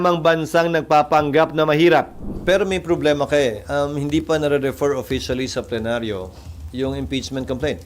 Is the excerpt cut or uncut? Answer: cut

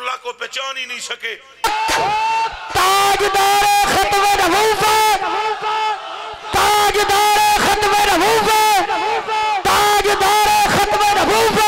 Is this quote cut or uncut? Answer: cut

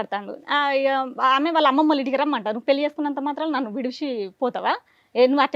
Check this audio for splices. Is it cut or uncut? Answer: uncut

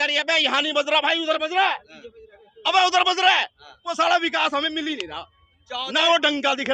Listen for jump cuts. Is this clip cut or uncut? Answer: uncut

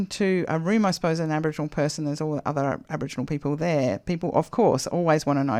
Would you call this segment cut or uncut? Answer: uncut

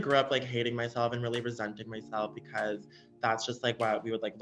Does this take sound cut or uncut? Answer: uncut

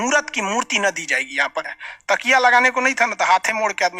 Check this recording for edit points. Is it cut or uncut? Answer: cut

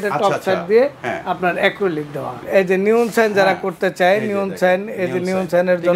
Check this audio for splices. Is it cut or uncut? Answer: cut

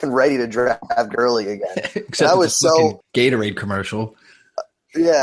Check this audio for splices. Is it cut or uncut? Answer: cut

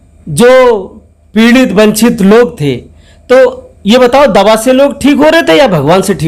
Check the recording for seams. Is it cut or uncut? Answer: uncut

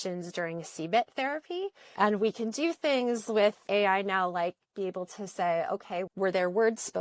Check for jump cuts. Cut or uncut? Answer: cut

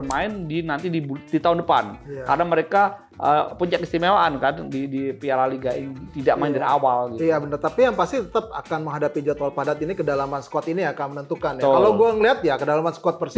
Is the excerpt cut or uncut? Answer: uncut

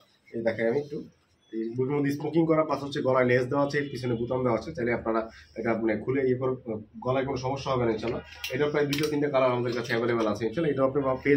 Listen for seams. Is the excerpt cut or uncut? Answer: uncut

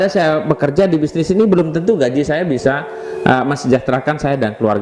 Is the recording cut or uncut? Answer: uncut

